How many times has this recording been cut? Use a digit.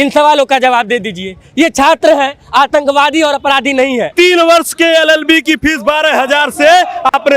1